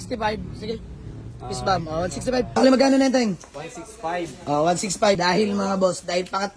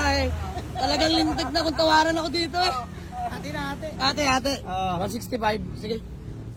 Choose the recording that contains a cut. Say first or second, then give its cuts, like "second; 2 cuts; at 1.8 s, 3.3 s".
first; 2 cuts; at 2.5 s, 5.2 s